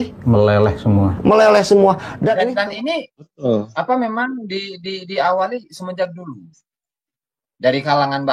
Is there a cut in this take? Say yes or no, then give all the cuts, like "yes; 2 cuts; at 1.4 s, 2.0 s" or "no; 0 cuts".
yes; 1 cut; at 2.4 s